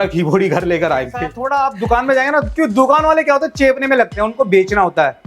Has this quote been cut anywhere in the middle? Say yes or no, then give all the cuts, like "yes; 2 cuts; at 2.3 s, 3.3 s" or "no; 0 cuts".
yes; 1 cut; at 1.3 s